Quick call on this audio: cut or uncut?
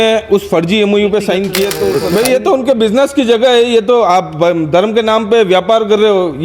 cut